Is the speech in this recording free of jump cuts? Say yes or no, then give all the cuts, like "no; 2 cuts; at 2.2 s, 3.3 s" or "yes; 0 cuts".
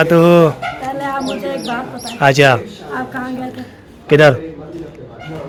yes; 0 cuts